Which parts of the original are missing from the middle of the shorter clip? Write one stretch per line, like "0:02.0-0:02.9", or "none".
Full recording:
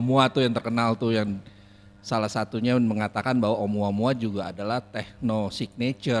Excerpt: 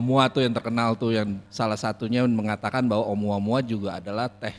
0:01.4-0:02.0